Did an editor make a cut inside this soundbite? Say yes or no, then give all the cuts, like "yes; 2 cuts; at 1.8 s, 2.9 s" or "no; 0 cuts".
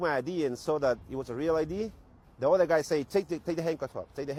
no; 0 cuts